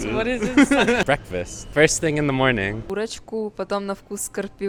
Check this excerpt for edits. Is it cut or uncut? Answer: uncut